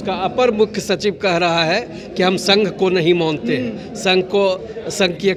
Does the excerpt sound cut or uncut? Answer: uncut